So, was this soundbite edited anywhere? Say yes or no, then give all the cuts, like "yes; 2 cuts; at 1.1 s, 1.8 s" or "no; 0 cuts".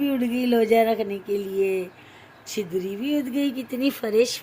no; 0 cuts